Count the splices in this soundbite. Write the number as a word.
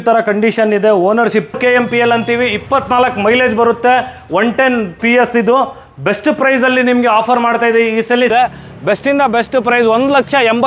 two